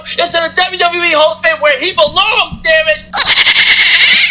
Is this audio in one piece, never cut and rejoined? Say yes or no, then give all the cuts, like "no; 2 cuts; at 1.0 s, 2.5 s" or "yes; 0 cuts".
no; 1 cut; at 3.0 s